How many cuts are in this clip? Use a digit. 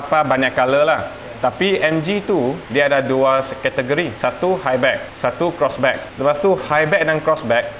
4